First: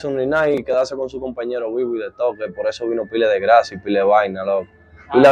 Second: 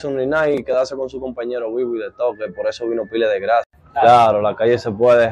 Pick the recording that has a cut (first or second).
second